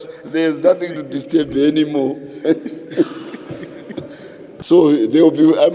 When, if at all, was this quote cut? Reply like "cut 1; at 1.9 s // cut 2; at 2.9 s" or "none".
cut 1; at 4.5 s